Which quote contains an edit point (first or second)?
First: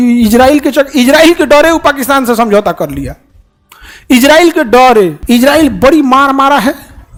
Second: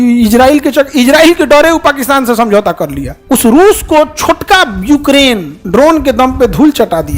second